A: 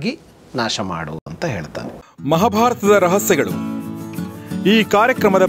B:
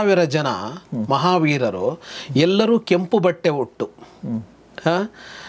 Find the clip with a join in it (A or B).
A